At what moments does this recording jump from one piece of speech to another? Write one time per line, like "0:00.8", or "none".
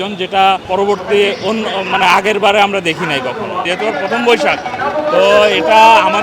0:03.7